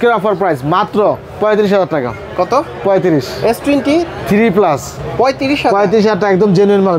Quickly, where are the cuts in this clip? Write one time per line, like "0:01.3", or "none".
none